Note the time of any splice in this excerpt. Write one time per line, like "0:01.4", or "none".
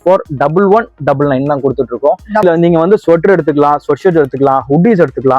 0:02.4